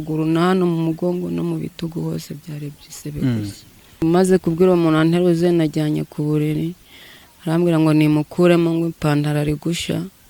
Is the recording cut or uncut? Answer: cut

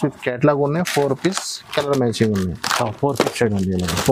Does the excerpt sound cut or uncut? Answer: uncut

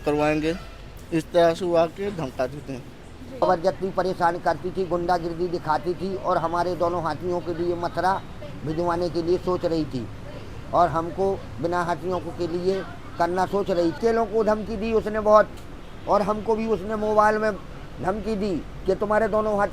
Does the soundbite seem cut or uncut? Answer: cut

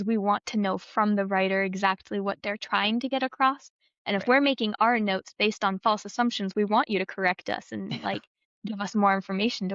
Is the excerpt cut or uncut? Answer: uncut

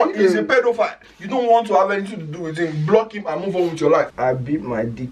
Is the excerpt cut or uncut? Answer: cut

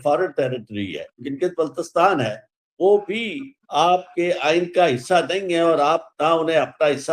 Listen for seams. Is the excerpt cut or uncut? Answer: cut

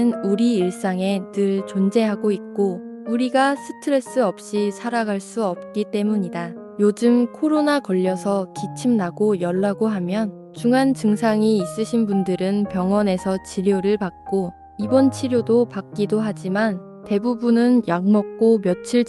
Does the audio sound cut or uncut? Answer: uncut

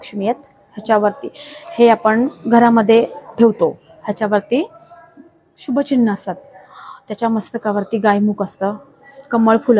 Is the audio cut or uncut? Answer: uncut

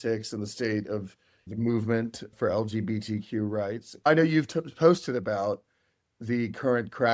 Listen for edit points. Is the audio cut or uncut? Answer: cut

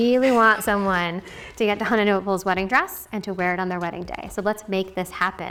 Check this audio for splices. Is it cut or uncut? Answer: uncut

